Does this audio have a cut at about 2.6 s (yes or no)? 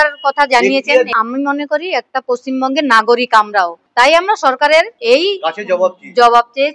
no